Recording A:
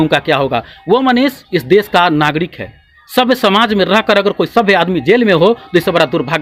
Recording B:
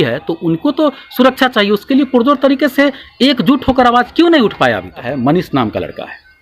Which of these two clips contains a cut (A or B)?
B